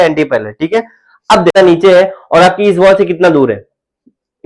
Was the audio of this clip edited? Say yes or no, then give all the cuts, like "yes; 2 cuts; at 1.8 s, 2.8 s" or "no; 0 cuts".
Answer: yes; 1 cut; at 1.5 s